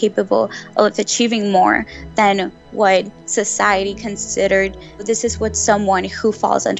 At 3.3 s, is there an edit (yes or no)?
no